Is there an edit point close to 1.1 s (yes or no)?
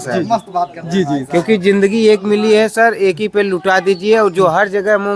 no